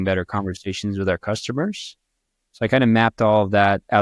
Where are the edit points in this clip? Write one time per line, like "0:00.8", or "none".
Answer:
none